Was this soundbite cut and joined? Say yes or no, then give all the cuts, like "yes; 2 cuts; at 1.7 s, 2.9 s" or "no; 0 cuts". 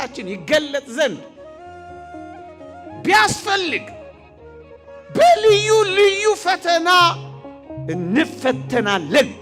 no; 0 cuts